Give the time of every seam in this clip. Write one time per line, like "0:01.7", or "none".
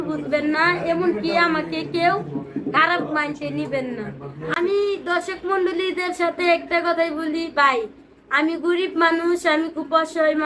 0:04.5